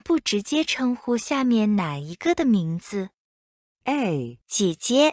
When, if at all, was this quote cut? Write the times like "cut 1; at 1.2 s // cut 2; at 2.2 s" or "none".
none